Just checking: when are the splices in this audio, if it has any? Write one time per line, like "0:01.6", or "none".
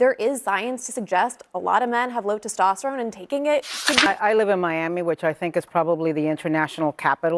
0:04.1